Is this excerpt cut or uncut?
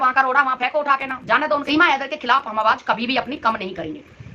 cut